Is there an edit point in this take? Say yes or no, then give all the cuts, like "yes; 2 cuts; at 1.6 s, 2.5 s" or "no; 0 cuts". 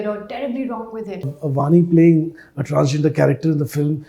yes; 1 cut; at 1.4 s